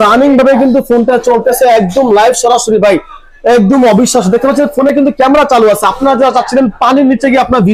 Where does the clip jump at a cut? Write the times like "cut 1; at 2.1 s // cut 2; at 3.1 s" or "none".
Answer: none